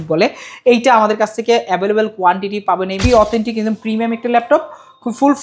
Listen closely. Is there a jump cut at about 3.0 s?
yes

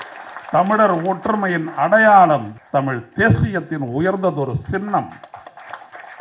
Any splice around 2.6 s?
yes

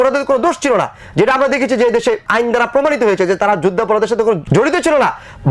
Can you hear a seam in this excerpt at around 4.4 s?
yes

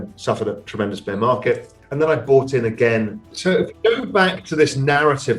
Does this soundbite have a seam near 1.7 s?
no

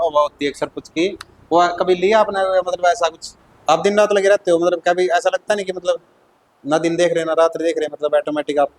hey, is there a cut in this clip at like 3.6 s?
yes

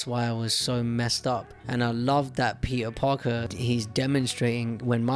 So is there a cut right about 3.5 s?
yes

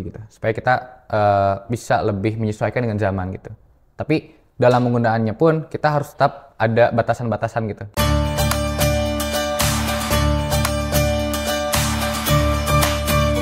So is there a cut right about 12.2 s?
yes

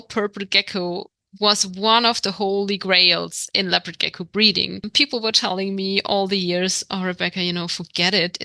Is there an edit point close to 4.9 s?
yes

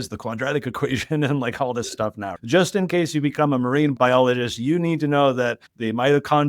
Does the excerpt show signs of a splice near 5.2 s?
no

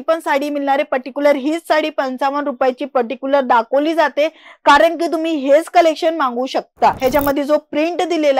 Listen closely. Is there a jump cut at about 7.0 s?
yes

